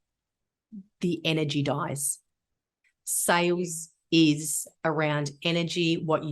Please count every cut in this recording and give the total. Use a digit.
0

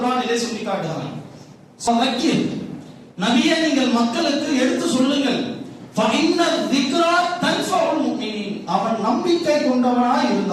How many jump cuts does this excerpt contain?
1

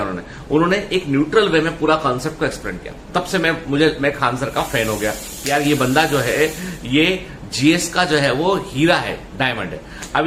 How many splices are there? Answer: 0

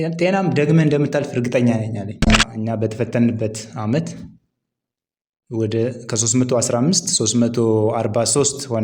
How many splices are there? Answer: 1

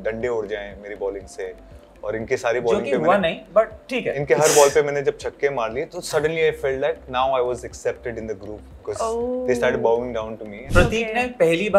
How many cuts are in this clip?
1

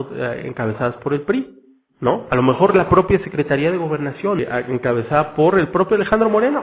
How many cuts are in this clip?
1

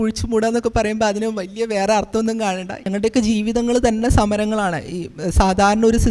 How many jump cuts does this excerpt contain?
1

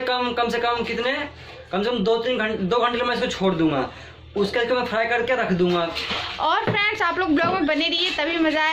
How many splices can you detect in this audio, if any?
1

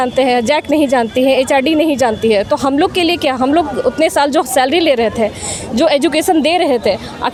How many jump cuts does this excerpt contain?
0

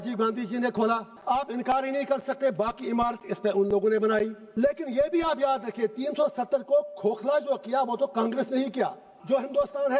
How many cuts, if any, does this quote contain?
3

